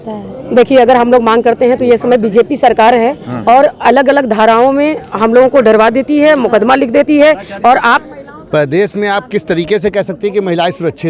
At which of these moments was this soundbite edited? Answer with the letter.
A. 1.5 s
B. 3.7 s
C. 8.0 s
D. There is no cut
C